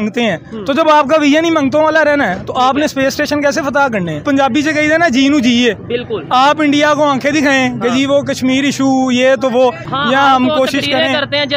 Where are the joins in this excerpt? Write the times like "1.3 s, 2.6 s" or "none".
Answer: 4.2 s, 9.9 s